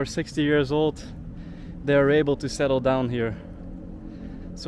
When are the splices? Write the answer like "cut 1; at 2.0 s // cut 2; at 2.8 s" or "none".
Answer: none